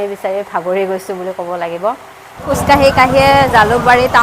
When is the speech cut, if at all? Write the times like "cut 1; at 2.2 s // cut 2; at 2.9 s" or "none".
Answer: cut 1; at 2.4 s